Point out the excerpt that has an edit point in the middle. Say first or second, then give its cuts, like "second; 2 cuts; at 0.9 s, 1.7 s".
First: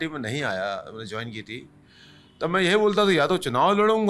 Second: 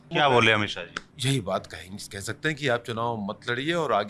second; 1 cut; at 1.0 s